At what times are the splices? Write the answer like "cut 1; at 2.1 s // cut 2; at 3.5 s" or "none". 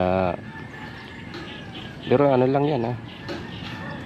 none